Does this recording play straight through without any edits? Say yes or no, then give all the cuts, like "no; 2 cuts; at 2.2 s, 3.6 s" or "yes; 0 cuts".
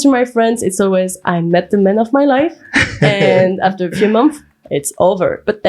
yes; 0 cuts